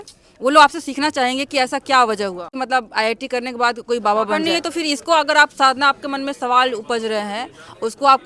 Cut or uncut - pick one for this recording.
cut